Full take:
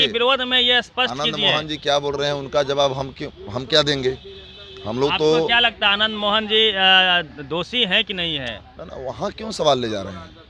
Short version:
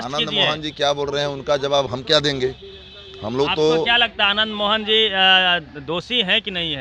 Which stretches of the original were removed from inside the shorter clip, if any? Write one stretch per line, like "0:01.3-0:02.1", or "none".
0:02.9-0:03.5